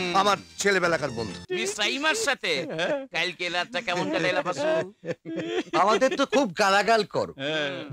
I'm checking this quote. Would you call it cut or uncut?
cut